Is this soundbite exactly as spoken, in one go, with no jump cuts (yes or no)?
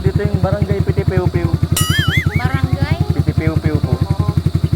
no